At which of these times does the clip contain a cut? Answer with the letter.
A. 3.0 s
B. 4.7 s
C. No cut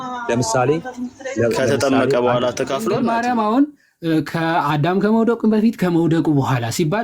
A